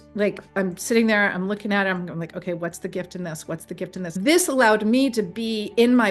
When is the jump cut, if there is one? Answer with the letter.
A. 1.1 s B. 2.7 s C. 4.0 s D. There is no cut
C